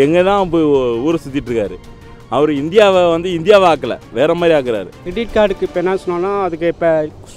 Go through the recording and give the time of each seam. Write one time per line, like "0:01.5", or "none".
0:05.0

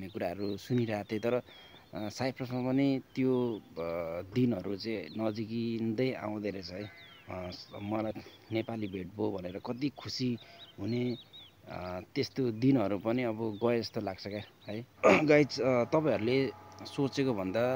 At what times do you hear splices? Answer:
0:08.1
0:14.9

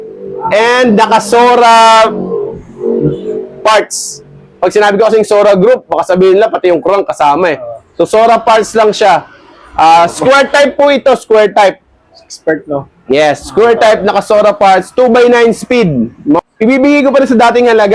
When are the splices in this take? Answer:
0:16.4

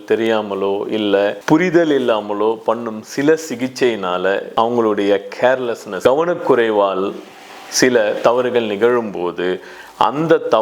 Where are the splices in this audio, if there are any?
0:01.4
0:04.5
0:05.9

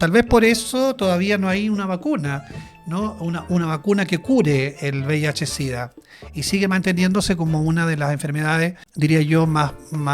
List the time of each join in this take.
0:08.8

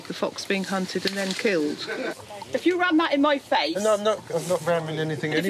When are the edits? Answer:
0:02.2

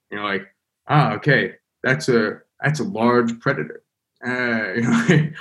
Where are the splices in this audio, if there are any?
none

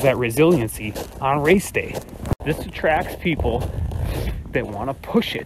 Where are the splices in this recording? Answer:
0:02.4

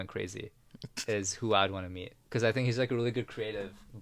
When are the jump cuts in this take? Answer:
0:02.2

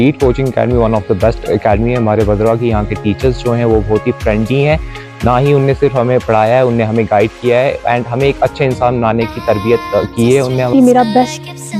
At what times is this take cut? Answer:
0:10.7

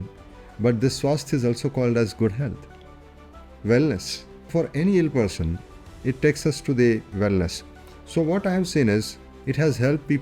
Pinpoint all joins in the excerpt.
0:04.5

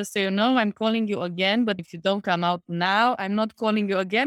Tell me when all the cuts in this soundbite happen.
0:01.9

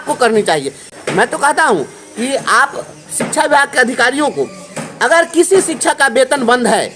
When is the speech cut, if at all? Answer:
0:00.9

